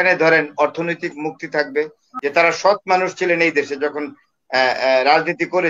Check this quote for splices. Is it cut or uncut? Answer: cut